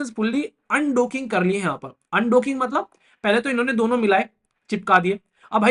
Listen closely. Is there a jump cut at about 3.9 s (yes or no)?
no